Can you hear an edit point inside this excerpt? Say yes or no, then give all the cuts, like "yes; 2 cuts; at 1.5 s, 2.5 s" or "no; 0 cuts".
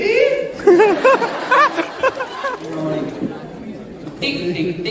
yes; 1 cut; at 2.7 s